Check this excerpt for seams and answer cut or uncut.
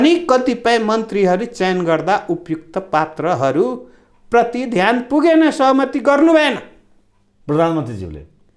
uncut